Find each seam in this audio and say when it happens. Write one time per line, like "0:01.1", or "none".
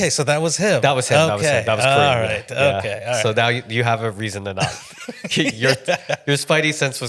none